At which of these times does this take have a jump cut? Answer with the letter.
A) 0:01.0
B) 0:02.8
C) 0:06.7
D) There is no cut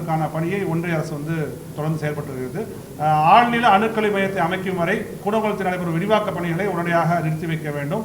B